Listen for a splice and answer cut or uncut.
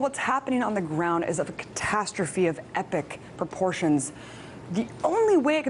cut